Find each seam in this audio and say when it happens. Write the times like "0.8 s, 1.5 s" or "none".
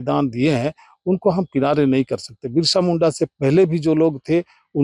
none